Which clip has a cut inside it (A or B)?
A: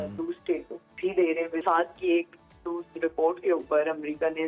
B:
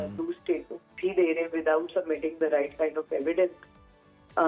A